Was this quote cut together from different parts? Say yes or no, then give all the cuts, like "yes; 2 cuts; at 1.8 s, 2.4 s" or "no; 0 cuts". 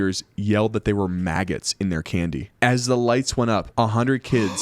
yes; 1 cut; at 3.7 s